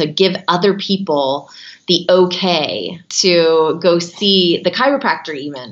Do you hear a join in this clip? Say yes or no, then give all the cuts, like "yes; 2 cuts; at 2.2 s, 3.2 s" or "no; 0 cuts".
yes; 1 cut; at 3.1 s